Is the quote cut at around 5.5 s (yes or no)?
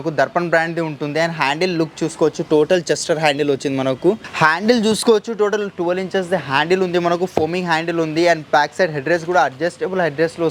no